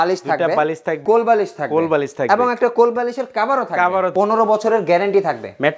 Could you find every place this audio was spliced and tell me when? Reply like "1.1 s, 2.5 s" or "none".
1.0 s, 4.1 s